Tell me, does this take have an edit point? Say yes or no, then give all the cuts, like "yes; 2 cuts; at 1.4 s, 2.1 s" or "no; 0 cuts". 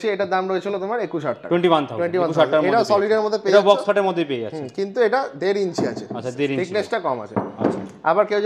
no; 0 cuts